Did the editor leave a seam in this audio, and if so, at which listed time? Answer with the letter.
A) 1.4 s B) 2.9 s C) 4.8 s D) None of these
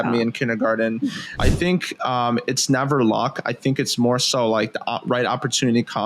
A